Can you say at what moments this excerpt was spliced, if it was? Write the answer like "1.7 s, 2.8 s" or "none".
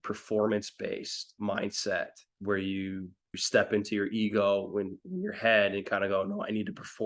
1.3 s, 2.3 s, 3.4 s